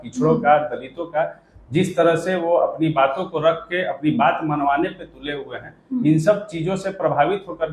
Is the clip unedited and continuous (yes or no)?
yes